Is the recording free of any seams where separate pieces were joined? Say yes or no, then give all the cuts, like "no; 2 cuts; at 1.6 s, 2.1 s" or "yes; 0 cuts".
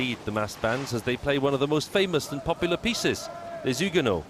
no; 1 cut; at 1.2 s